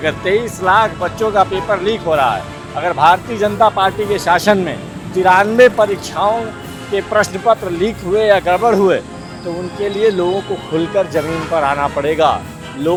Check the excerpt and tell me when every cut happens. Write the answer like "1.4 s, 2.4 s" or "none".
none